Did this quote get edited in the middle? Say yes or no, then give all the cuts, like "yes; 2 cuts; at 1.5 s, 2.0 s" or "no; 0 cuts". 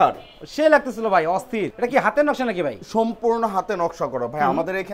no; 0 cuts